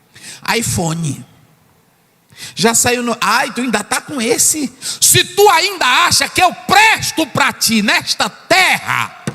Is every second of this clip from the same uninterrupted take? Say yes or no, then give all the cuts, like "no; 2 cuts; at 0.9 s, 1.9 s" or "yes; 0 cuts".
no; 1 cut; at 4.9 s